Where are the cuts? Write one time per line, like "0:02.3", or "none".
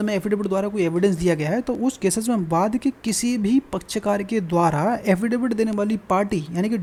none